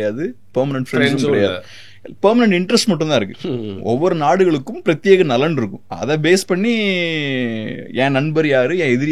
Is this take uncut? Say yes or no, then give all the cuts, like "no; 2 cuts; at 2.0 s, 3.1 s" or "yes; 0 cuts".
yes; 0 cuts